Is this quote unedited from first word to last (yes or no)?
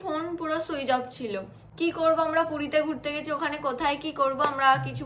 yes